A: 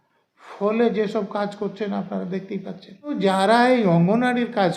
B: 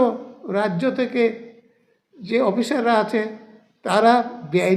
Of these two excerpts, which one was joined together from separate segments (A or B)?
A